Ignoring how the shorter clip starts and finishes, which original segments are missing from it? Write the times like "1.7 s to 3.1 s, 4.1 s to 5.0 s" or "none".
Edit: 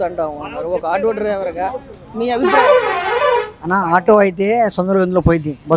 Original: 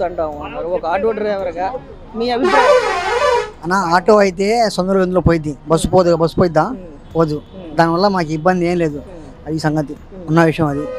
none